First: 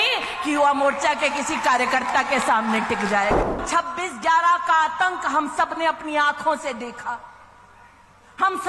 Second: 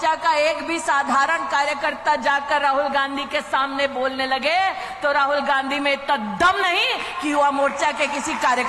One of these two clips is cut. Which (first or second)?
first